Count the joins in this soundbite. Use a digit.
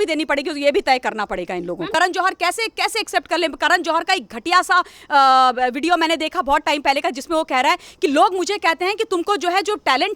1